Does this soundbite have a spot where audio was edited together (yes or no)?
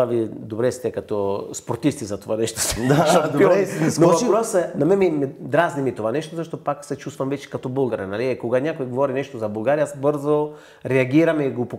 no